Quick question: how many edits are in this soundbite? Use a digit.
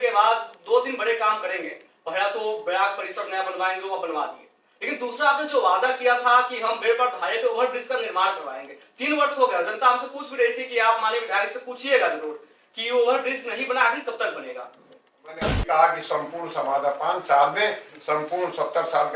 1